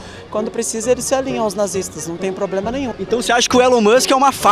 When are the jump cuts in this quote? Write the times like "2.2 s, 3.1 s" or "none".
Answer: 2.9 s